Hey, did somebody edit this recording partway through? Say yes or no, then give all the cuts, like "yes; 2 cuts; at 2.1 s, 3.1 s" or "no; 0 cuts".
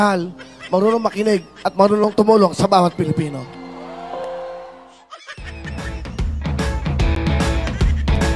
yes; 1 cut; at 5.2 s